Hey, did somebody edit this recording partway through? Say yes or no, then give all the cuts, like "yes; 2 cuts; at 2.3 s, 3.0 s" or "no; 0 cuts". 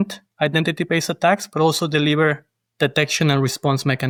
no; 0 cuts